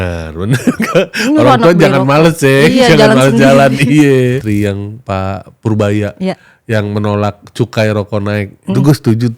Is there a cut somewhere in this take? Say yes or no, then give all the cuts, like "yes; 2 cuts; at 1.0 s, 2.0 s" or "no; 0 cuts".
yes; 1 cut; at 4.4 s